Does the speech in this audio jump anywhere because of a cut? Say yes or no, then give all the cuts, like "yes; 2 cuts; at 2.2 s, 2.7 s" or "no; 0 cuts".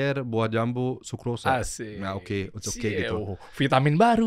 no; 0 cuts